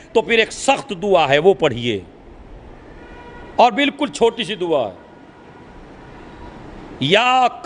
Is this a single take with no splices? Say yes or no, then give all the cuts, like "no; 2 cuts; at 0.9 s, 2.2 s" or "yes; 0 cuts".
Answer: yes; 0 cuts